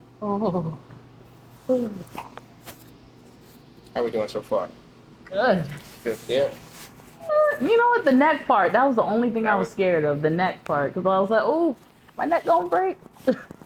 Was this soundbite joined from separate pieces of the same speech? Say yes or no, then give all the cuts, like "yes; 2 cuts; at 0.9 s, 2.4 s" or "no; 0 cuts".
no; 0 cuts